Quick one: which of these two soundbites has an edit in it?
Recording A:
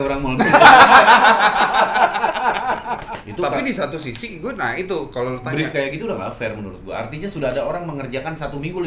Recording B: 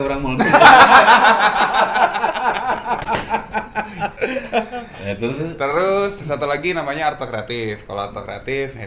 A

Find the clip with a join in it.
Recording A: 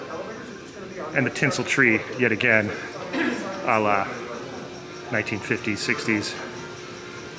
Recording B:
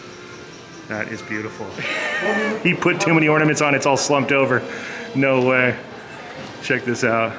B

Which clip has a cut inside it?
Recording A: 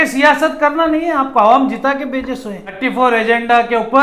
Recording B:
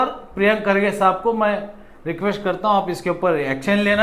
A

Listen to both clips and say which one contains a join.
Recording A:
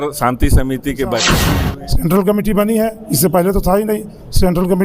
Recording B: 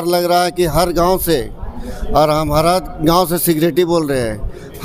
A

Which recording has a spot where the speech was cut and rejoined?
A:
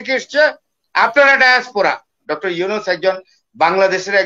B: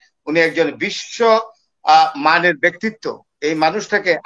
A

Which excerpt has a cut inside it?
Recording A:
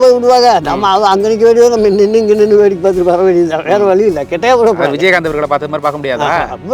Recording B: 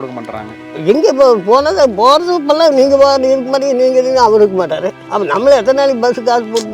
B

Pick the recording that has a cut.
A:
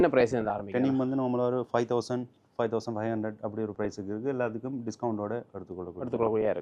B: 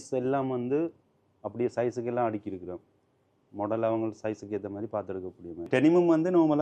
B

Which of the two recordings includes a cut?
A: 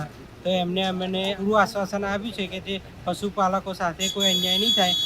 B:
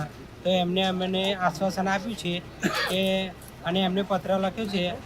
A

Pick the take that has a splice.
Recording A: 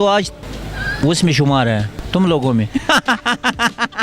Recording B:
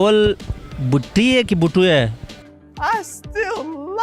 A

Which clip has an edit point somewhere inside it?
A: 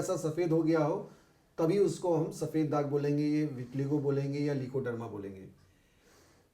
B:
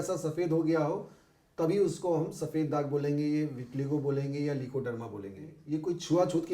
B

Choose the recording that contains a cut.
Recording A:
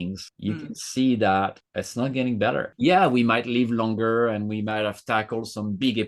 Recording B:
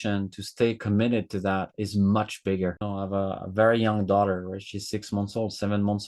B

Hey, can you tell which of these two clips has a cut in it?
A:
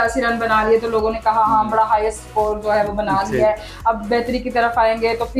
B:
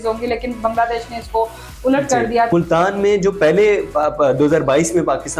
B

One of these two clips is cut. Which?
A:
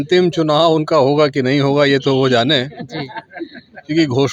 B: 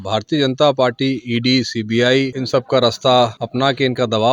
B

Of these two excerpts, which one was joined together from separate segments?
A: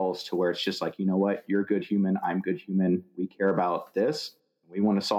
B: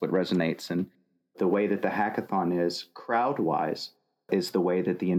B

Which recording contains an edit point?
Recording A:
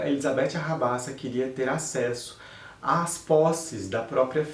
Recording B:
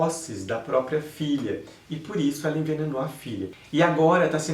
B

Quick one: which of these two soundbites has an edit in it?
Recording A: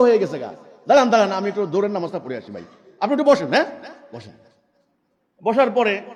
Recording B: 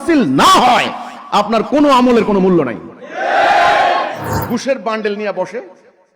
B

